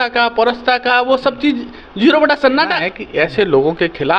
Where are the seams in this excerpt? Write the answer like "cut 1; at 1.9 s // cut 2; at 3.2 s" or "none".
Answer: cut 1; at 2.9 s

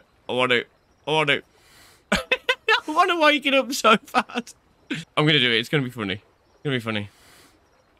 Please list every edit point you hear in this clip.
cut 1; at 5.0 s

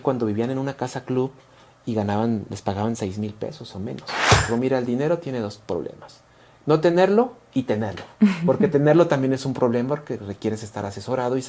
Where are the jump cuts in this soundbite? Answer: cut 1; at 4.5 s

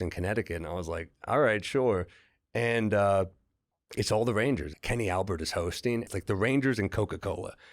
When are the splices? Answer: cut 1; at 4.8 s // cut 2; at 6.1 s

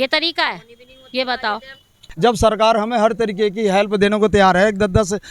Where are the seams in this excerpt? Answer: cut 1; at 2.0 s

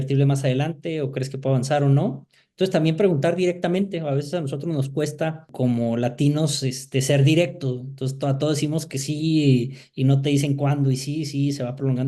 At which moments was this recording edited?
cut 1; at 5.5 s

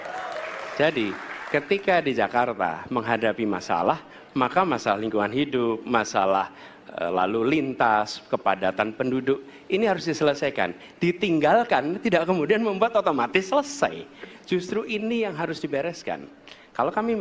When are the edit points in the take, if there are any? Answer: none

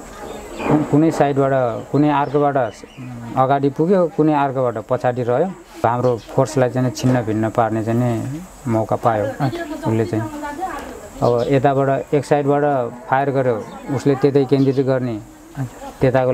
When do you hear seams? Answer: cut 1; at 5.8 s

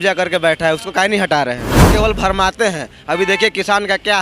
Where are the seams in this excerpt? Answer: cut 1; at 1.7 s

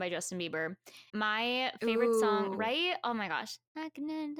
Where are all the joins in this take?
none

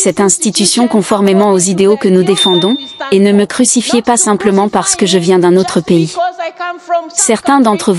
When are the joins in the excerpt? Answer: cut 1; at 2.9 s

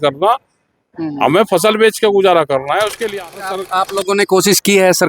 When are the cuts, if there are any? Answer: cut 1; at 3.6 s

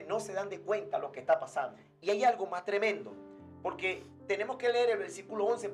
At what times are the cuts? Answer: none

